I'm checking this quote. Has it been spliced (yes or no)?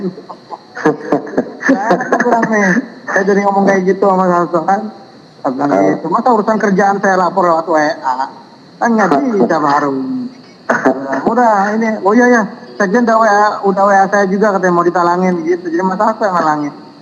no